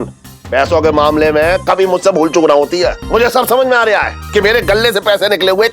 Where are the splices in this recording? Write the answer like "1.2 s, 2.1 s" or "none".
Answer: 3.0 s